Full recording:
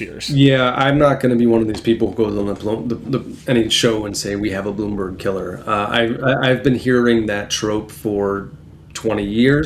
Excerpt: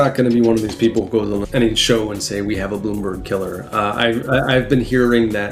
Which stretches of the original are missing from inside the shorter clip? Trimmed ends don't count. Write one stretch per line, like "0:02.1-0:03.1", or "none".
0:02.5-0:03.4